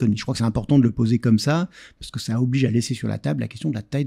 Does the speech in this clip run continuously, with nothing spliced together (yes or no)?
yes